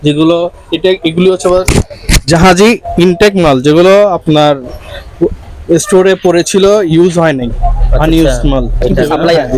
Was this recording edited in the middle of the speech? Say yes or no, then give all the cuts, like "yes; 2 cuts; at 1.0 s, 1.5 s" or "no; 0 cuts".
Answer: no; 0 cuts